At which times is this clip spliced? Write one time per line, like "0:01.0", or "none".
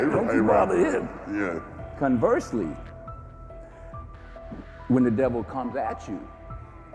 none